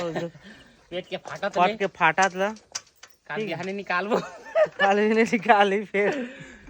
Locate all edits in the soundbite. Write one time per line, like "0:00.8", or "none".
none